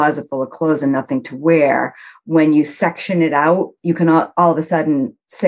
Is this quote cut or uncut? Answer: uncut